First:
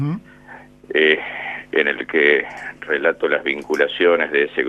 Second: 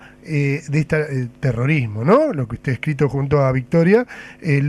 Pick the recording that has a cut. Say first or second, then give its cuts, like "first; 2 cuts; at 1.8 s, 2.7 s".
second; 1 cut; at 2.8 s